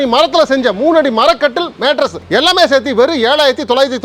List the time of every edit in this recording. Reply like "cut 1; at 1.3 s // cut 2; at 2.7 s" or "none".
none